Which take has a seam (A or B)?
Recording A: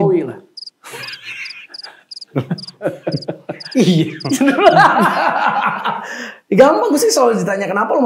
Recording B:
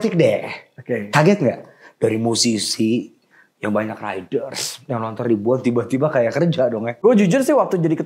B